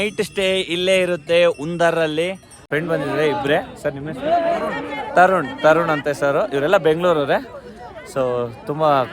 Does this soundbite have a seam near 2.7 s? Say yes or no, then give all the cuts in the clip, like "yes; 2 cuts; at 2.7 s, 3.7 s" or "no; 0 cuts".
yes; 1 cut; at 2.7 s